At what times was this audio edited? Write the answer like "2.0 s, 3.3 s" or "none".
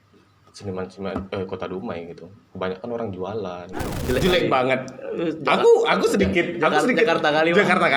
3.9 s